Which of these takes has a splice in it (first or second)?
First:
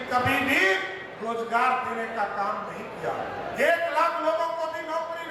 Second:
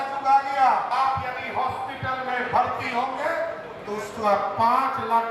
second